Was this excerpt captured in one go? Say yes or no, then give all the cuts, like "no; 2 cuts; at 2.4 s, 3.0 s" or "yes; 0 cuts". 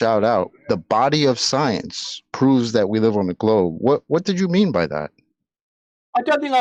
yes; 0 cuts